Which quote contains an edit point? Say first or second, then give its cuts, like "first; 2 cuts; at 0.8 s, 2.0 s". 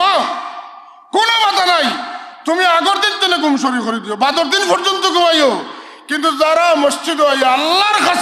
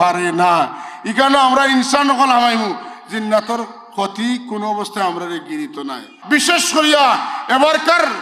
second; 1 cut; at 6.1 s